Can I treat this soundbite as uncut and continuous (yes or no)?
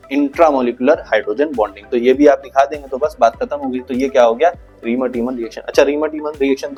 yes